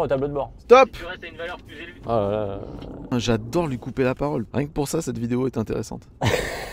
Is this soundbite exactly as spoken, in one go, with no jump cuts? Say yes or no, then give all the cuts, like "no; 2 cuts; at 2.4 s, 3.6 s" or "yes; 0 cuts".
no; 2 cuts; at 3.0 s, 4.5 s